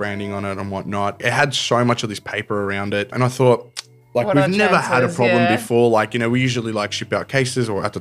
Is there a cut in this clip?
yes; 2 cuts; at 1.2 s, 3.1 s

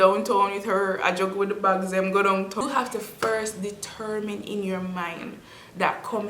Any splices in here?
yes; 1 cut; at 2.6 s

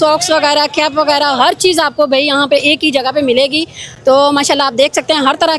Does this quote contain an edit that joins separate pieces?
no; 0 cuts

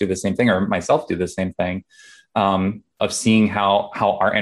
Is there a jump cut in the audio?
no; 0 cuts

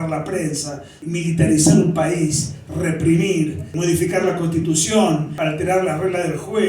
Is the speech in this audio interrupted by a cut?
yes; 3 cuts; at 0.9 s, 3.7 s, 5.4 s

